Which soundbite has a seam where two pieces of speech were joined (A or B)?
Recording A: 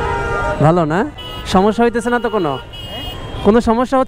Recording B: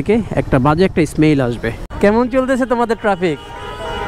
B